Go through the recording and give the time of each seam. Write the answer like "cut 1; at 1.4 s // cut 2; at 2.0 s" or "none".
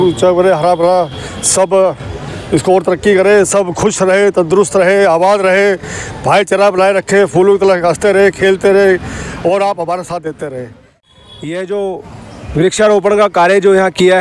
cut 1; at 11.1 s